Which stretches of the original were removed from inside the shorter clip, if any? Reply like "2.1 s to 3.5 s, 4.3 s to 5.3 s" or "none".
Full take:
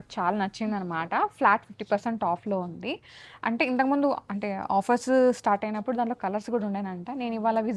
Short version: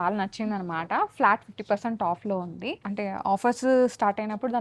3.1 s to 4.3 s